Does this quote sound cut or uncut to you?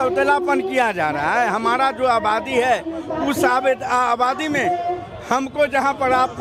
uncut